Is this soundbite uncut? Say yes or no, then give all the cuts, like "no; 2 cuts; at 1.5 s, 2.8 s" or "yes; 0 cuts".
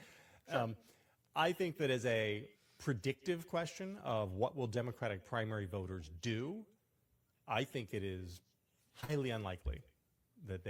yes; 0 cuts